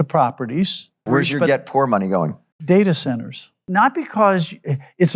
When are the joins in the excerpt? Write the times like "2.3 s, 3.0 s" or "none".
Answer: 1.1 s, 2.5 s, 3.6 s